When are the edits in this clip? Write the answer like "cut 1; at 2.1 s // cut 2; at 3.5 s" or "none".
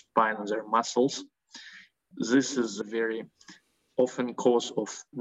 cut 1; at 2.1 s